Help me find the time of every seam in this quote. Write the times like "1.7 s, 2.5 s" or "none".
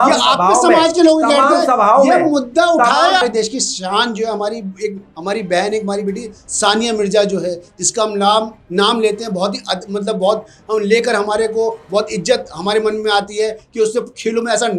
3.2 s